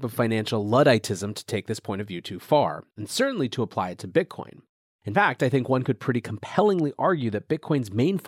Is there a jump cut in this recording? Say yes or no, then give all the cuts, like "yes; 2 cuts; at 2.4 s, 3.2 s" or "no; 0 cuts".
no; 0 cuts